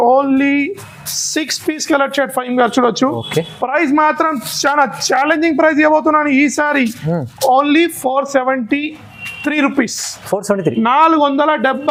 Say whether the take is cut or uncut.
uncut